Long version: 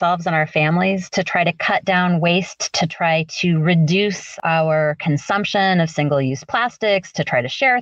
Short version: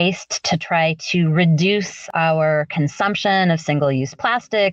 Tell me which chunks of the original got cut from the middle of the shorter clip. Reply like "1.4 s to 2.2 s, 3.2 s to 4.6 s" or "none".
none

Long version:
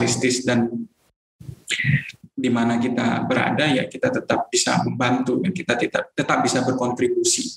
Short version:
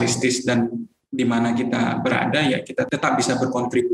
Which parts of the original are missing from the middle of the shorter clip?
0.9 s to 2.2 s, 4.1 s to 6.1 s

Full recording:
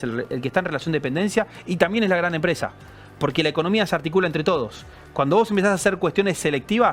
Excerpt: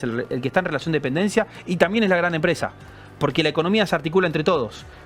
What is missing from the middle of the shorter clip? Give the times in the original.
none

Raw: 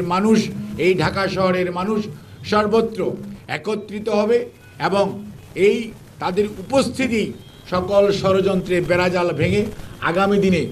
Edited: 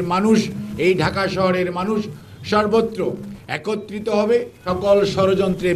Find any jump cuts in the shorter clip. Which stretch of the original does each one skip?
4.6 s to 7.6 s

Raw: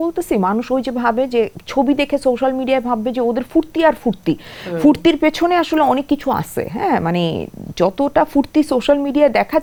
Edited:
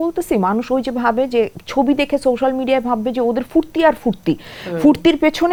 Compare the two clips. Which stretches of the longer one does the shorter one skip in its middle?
none

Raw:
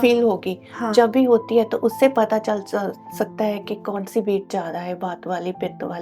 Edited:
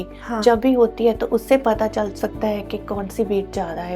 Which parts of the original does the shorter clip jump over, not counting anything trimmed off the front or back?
2.6 s to 3.1 s

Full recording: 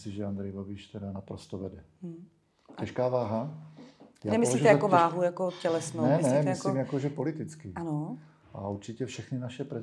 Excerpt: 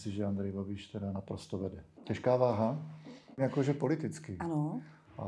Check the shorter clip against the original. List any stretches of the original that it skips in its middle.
1.9 s to 2.6 s, 4.2 s to 6.8 s

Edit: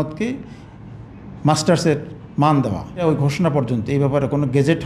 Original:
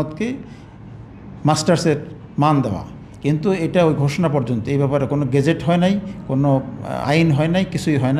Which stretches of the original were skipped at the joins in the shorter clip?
3.0 s to 3.8 s

